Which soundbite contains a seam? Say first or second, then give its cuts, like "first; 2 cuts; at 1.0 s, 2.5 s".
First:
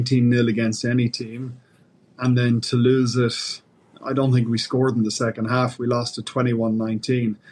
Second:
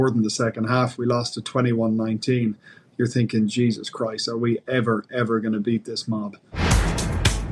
second; 1 cut; at 6.6 s